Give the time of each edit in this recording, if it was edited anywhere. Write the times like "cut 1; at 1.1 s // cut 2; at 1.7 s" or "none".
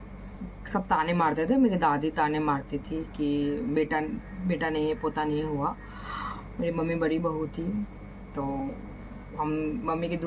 none